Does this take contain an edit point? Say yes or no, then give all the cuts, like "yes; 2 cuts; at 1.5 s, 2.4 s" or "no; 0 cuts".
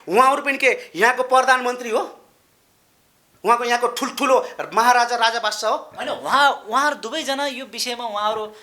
no; 0 cuts